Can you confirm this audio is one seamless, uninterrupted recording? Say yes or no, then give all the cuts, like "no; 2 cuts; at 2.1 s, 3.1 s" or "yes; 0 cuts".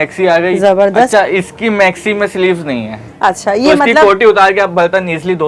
yes; 0 cuts